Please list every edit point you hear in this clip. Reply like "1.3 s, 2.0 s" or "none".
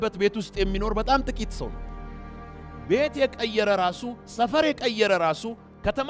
none